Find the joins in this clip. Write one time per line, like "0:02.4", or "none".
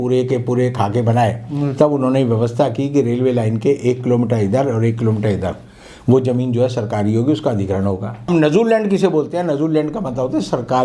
0:08.3